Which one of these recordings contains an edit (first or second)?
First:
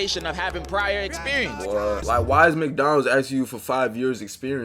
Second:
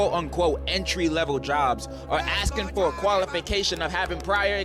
first